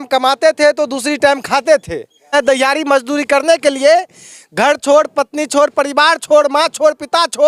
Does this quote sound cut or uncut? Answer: cut